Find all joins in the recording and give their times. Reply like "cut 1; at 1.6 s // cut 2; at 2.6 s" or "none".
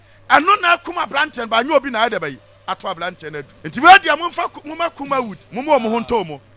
cut 1; at 3.5 s // cut 2; at 5.4 s